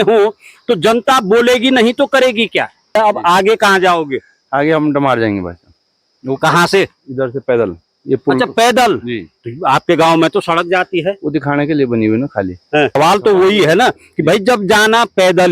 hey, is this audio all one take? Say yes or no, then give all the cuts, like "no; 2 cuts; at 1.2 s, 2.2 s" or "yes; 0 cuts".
no; 2 cuts; at 3.0 s, 13.0 s